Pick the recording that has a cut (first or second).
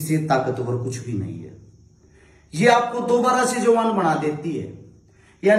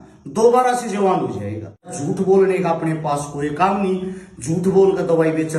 second